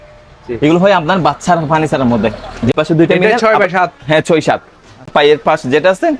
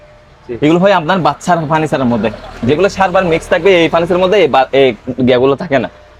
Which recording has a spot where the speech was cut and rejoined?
first; 2 cuts; at 2.7 s, 5.0 s

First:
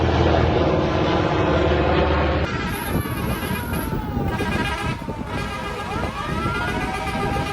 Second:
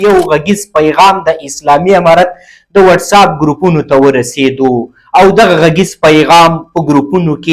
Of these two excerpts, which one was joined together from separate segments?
first; 1 cut; at 2.5 s

